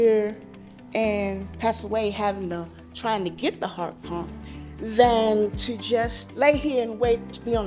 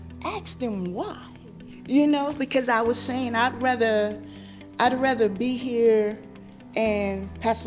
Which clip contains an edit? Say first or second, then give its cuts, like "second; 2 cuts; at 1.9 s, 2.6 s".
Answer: first; 1 cut; at 6.2 s